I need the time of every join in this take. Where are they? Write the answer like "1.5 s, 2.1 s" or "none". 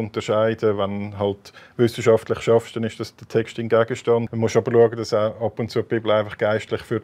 4.3 s